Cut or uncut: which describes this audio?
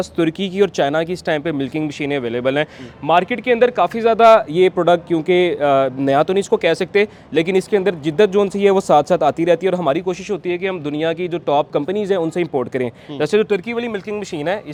uncut